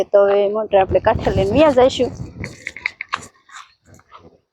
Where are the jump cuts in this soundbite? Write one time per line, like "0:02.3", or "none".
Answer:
none